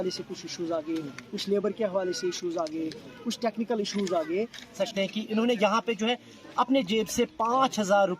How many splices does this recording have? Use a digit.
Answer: 1